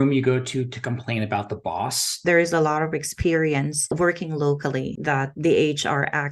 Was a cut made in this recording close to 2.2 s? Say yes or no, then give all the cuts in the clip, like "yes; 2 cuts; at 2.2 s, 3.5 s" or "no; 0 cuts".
yes; 3 cuts; at 2.2 s, 3.9 s, 4.9 s